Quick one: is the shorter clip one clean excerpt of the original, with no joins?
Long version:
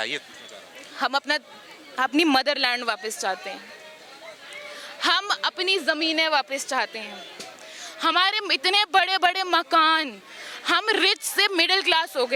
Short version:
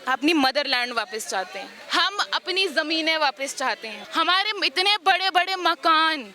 no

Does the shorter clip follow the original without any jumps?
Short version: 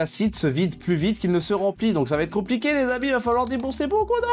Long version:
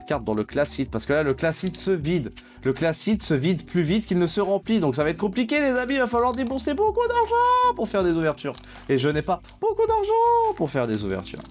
yes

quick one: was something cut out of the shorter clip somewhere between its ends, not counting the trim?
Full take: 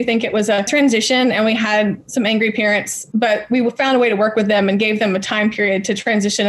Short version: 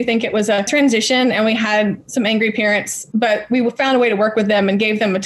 no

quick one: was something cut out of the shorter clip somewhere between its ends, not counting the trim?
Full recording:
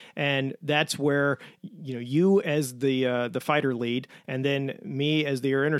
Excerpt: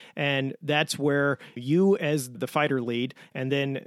yes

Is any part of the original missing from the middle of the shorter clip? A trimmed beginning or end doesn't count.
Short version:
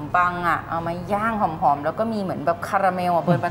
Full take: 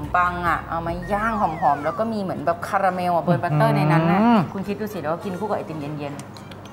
no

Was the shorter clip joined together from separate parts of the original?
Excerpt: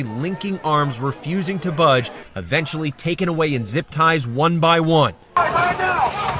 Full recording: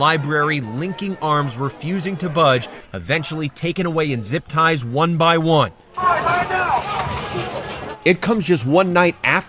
yes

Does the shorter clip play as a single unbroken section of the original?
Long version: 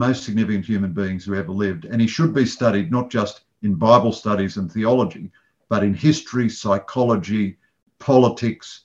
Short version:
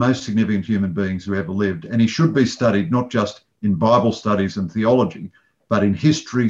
yes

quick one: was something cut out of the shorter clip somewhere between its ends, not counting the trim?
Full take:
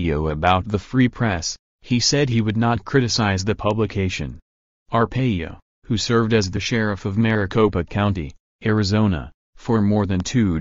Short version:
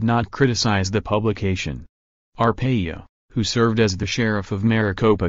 no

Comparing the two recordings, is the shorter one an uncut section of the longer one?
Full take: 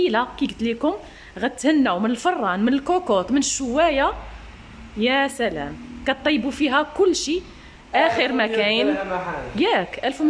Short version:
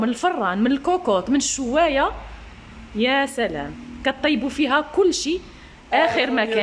yes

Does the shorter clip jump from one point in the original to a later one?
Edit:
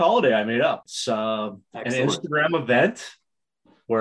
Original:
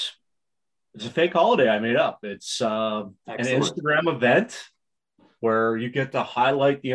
yes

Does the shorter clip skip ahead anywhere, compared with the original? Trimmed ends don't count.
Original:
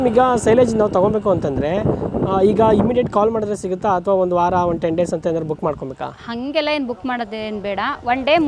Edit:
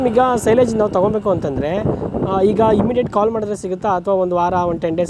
no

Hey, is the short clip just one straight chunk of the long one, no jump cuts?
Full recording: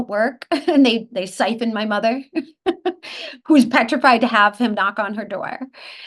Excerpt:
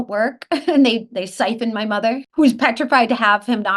no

